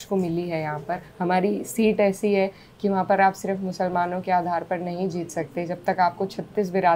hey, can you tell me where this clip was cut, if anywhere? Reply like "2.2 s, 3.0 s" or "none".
1.1 s